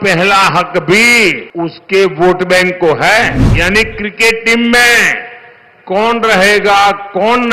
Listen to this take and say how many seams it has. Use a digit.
2